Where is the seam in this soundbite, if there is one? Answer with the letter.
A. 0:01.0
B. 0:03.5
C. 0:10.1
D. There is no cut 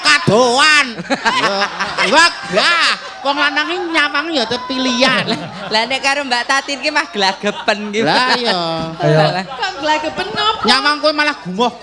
A